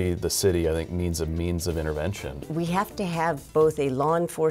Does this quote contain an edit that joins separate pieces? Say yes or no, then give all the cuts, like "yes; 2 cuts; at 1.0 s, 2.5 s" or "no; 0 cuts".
yes; 1 cut; at 2.5 s